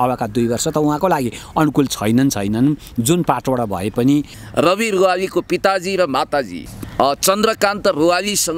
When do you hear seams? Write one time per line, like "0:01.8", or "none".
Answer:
0:04.4